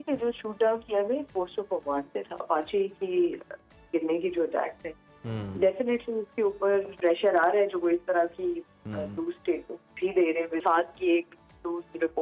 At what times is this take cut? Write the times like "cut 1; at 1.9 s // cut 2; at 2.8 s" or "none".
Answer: cut 1; at 2.4 s // cut 2; at 7.0 s // cut 3; at 10.6 s